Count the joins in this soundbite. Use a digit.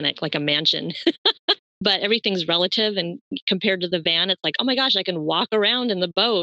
1